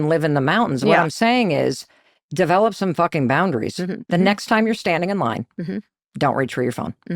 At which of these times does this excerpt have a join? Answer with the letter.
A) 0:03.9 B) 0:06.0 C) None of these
A